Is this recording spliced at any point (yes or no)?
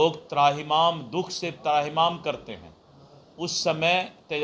no